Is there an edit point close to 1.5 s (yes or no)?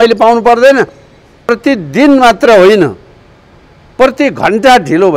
yes